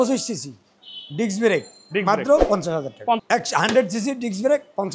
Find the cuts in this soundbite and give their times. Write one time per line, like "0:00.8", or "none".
0:03.2